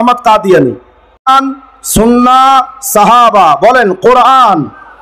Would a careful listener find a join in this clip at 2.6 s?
no; 1 cut; at 1.3 s

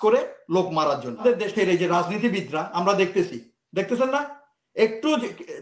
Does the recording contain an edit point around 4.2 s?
no; 1 cut; at 1.2 s

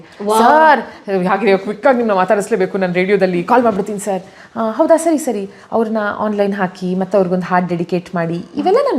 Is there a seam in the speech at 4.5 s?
no; 0 cuts

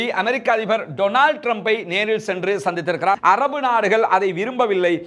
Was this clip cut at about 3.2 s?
yes; 1 cut; at 3.2 s

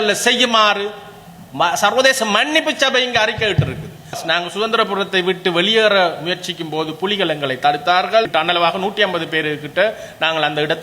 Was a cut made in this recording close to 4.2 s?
yes; 1 cut; at 4.2 s

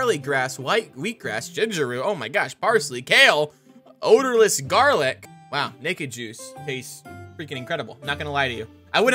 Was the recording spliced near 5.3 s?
yes; 1 cut; at 5.3 s

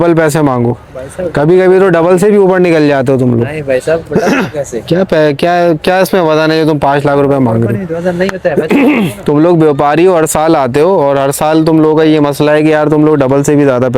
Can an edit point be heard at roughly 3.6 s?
no; 0 cuts

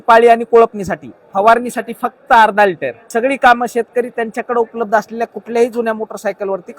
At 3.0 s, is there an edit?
yes; 1 cut; at 3.0 s

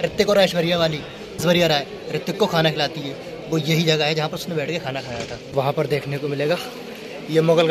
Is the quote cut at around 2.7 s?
no; 2 cuts; at 1.4 s, 5.5 s

